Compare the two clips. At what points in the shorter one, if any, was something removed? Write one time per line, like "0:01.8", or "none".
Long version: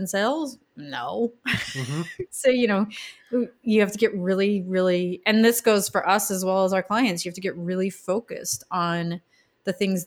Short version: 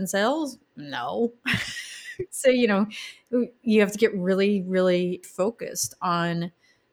0:05.2